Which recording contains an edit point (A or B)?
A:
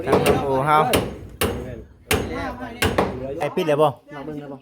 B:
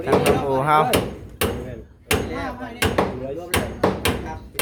A